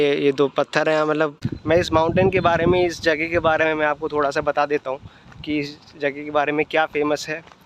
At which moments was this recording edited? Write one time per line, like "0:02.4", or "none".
0:01.5